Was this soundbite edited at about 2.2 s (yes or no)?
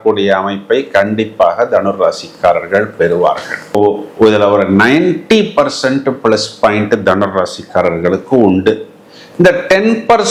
no